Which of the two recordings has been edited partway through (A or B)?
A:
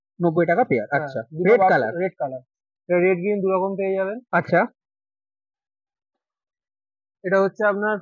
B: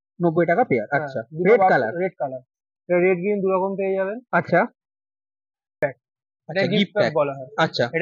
B